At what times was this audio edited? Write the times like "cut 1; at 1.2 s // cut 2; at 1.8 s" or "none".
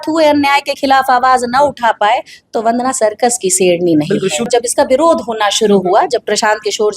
cut 1; at 4.5 s